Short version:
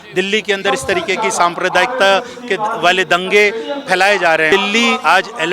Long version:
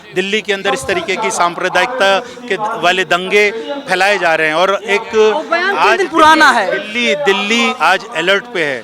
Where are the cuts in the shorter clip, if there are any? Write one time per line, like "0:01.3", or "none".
0:04.5